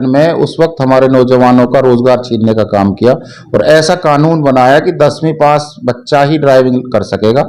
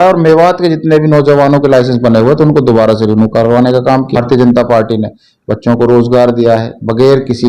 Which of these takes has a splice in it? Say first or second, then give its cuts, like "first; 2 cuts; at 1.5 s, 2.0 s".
second; 1 cut; at 4.2 s